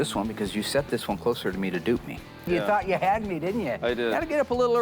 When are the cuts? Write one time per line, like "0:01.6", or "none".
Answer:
0:02.5